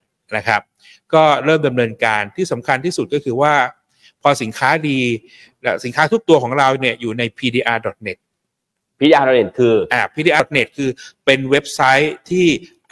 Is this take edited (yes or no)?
yes